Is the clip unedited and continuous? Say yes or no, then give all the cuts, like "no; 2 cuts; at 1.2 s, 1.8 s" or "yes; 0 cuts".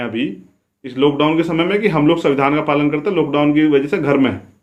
yes; 0 cuts